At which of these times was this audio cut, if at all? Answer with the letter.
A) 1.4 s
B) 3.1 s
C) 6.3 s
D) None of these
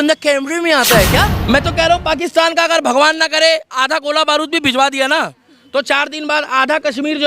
A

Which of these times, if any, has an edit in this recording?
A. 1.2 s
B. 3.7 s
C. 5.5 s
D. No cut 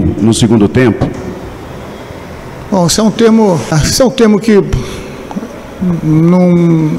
B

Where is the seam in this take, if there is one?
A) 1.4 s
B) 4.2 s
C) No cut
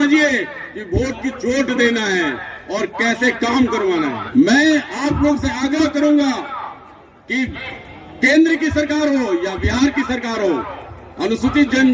B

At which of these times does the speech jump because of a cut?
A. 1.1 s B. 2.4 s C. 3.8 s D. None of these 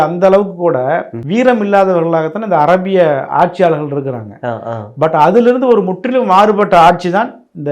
A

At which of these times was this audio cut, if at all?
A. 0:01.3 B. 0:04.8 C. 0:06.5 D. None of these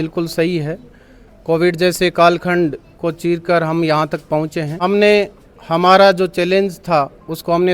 B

